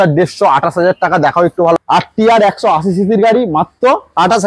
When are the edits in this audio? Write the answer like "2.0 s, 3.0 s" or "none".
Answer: 1.8 s